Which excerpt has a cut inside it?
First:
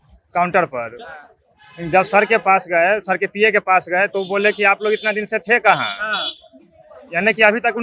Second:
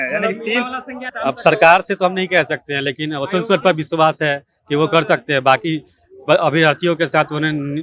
second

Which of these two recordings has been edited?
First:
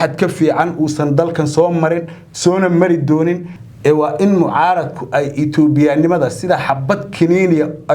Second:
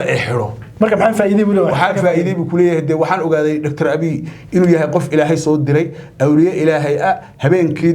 first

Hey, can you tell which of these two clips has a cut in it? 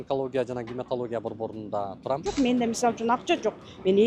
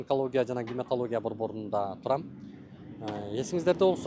first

